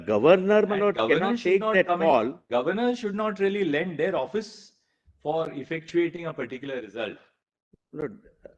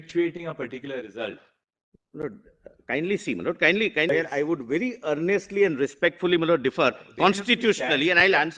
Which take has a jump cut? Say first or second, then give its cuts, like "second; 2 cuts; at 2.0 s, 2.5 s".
second; 1 cut; at 4.1 s